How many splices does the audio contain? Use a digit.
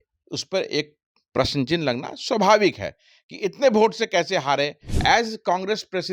1